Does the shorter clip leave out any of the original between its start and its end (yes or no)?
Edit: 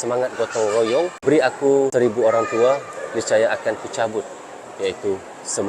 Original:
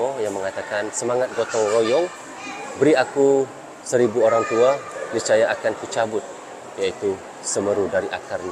yes